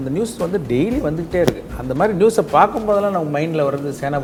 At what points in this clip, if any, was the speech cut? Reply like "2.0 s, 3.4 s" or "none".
none